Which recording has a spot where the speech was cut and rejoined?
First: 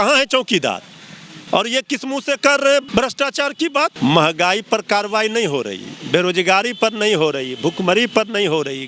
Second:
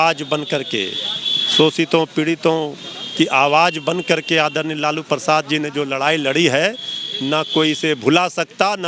first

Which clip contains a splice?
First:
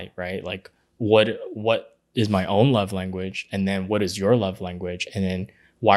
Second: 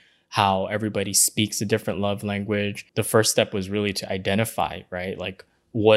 second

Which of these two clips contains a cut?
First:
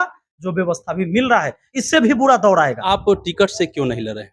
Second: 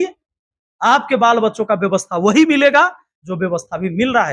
first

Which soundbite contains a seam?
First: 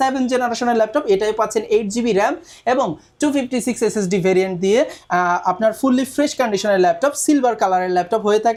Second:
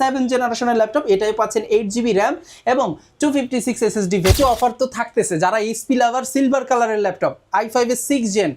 second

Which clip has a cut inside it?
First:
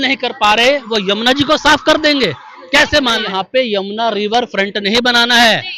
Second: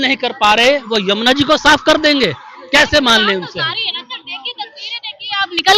first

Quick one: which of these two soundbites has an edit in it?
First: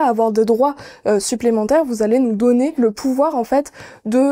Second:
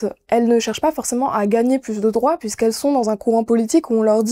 first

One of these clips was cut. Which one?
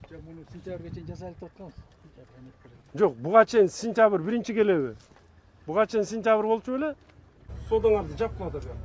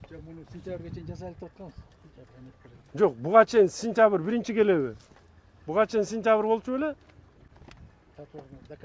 first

